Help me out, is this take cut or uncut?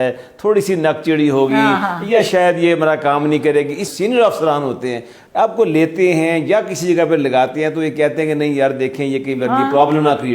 cut